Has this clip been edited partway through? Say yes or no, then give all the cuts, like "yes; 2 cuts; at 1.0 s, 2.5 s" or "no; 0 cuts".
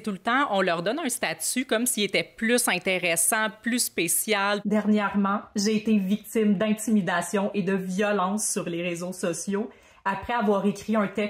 yes; 1 cut; at 4.6 s